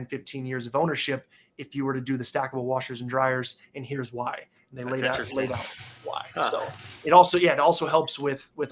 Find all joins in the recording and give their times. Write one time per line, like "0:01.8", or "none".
none